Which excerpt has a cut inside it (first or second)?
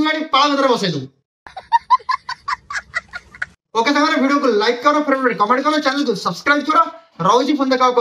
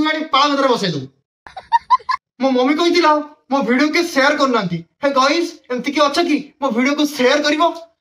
second